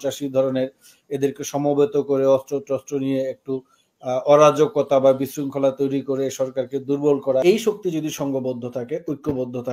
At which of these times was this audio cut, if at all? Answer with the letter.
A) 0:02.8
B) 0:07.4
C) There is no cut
B